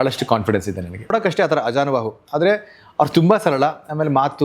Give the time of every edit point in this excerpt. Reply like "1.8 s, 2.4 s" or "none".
1.1 s